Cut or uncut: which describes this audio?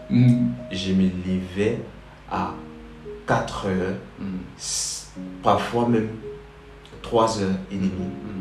uncut